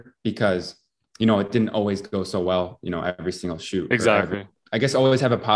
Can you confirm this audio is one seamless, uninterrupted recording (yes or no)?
no